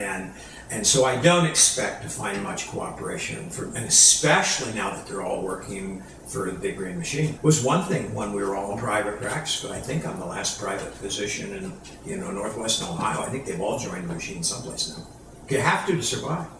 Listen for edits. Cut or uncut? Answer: cut